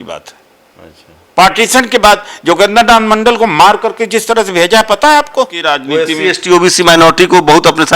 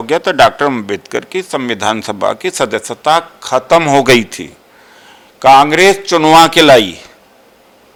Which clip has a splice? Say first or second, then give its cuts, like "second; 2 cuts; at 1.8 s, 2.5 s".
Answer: first; 1 cut; at 5.7 s